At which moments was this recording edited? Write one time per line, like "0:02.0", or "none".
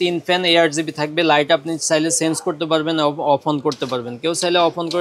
none